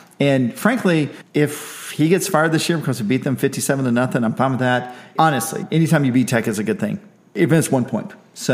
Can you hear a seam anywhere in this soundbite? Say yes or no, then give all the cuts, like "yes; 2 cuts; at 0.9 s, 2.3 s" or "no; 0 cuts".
yes; 3 cuts; at 1.2 s, 5.1 s, 7.3 s